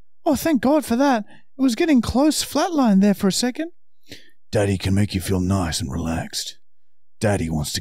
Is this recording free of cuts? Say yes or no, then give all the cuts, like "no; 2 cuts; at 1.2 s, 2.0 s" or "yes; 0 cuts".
yes; 0 cuts